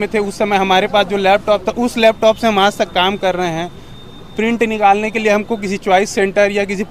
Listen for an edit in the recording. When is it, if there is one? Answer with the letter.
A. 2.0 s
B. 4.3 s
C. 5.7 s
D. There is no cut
D